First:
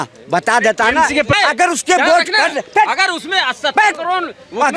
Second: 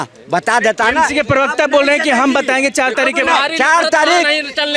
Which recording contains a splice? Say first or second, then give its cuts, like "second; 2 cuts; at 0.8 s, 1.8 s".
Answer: first; 1 cut; at 1.3 s